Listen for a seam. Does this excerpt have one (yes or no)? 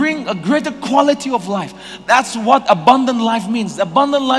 no